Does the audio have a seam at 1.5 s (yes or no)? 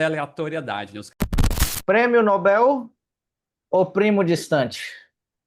yes